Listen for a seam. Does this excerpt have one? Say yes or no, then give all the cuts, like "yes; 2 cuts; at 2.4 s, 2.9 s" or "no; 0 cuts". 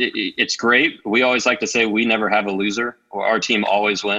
no; 0 cuts